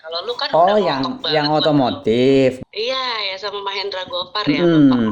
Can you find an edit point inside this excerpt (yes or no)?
yes